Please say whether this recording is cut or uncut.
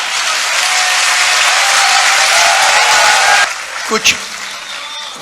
cut